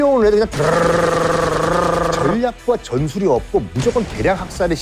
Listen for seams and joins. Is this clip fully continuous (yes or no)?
no